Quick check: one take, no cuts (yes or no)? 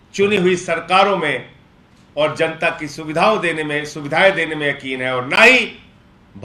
yes